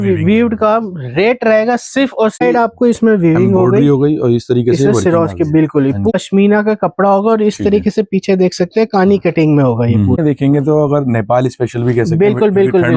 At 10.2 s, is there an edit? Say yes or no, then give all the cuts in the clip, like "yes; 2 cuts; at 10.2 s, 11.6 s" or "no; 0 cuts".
yes; 3 cuts; at 2.4 s, 6.1 s, 10.2 s